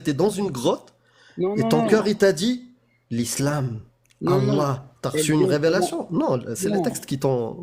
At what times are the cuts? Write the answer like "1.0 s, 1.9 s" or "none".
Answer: none

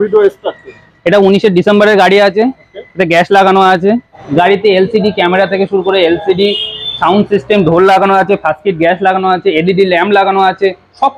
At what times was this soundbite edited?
4.2 s

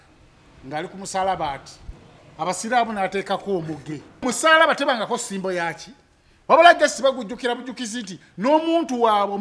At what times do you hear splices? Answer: 2.2 s, 4.2 s

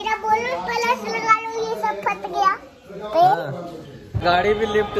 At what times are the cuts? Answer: 4.1 s

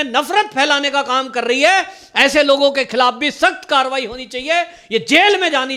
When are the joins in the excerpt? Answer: none

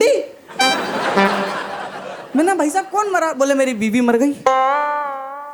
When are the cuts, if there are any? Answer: none

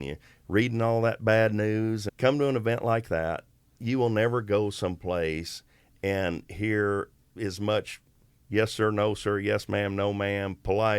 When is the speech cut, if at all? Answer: 2.1 s, 3.8 s, 7.2 s

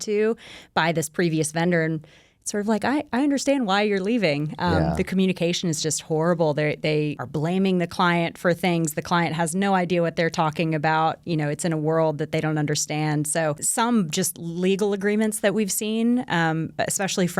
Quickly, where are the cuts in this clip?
7.2 s, 13.6 s

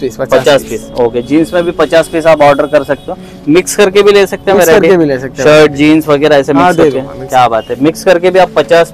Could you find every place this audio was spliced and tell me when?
none

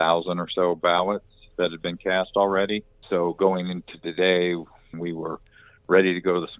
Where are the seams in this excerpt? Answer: 3.0 s, 5.0 s

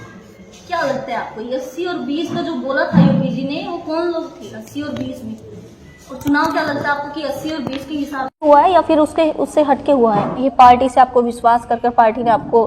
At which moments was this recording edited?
10.3 s

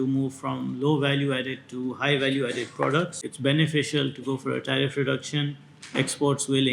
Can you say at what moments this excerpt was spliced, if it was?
3.2 s

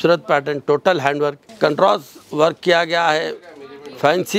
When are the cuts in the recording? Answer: 1.4 s

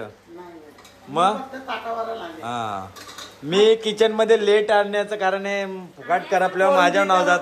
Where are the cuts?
none

